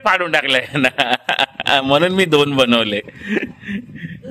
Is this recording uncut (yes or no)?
yes